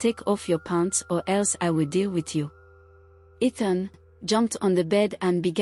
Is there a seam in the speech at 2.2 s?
no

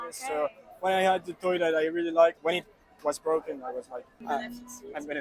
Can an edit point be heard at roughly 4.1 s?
yes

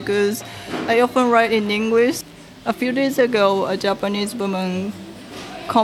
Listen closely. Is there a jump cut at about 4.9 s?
no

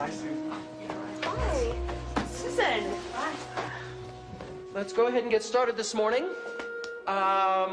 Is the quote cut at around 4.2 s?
yes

